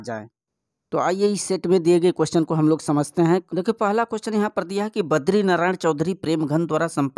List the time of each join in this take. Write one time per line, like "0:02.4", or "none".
0:03.4